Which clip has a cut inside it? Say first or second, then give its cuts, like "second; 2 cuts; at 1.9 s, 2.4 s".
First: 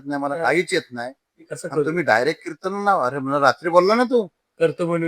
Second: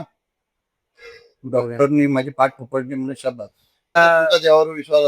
second; 1 cut; at 4.0 s